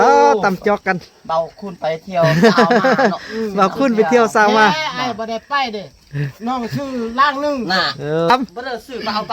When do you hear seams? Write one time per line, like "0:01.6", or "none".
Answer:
0:08.3

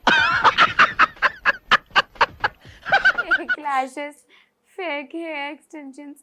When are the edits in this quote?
0:03.5

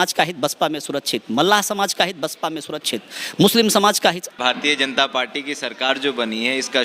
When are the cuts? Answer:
0:04.4

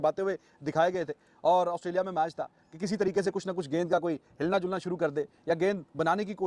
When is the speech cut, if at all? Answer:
none

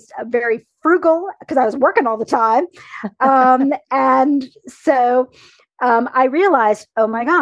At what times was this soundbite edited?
none

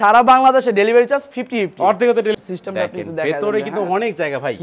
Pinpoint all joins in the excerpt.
0:02.3

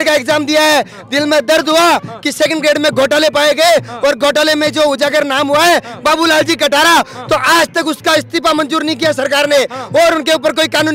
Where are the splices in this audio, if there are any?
none

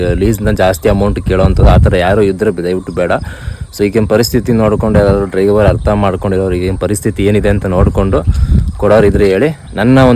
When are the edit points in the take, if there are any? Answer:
none

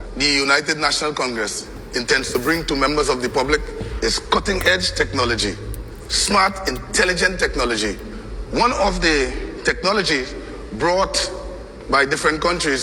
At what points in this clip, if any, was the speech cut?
none

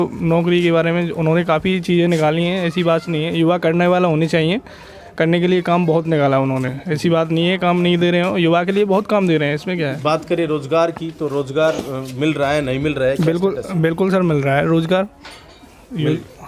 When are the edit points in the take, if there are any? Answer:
none

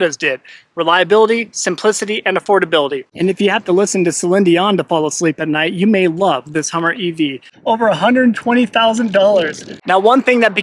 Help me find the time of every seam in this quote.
0:03.0
0:07.5
0:09.7

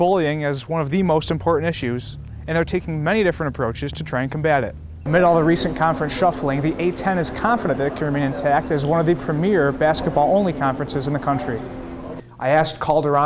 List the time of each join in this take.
0:04.9
0:12.2

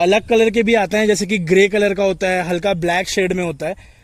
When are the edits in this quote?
none

